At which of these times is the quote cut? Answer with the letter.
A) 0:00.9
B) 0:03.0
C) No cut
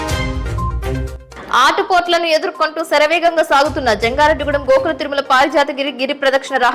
A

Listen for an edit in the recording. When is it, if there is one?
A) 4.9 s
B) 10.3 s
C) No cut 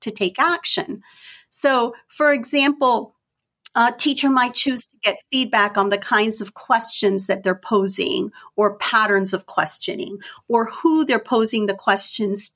C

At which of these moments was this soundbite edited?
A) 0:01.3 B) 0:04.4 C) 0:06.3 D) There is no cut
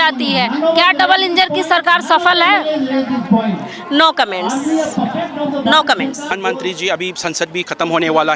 C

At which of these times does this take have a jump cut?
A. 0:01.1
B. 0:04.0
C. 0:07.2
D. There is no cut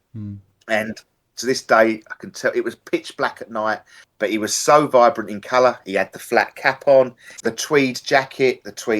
C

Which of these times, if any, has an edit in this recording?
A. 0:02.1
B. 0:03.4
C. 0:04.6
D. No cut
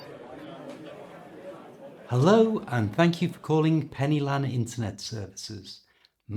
A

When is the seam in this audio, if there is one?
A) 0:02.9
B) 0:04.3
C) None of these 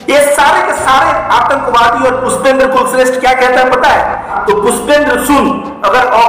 B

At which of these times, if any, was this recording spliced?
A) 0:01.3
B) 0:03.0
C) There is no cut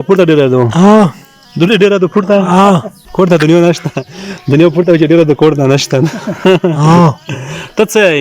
B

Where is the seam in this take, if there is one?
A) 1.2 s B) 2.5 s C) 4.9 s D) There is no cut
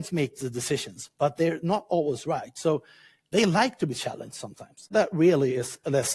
C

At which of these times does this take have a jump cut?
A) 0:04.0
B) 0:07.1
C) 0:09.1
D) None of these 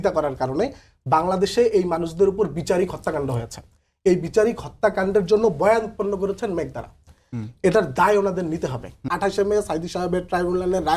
C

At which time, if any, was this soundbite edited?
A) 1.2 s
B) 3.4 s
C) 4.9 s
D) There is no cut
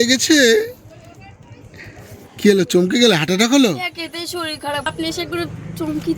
C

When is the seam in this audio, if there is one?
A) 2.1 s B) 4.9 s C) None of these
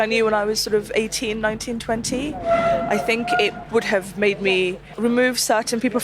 B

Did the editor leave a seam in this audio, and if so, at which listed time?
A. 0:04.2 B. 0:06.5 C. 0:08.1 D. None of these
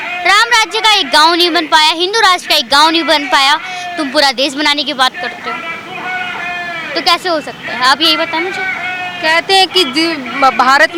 D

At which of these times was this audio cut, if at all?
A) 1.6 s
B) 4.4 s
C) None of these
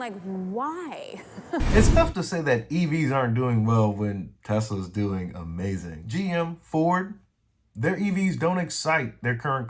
C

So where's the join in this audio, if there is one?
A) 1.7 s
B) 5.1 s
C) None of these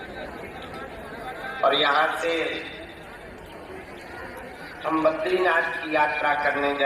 C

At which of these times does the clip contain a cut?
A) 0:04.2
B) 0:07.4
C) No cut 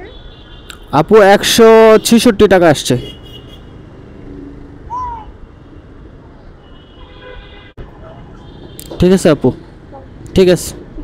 B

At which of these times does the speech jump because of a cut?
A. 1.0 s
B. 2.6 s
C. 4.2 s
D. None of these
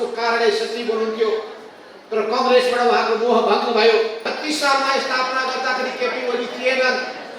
C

